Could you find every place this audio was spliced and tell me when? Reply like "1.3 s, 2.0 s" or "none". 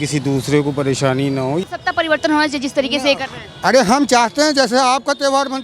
1.6 s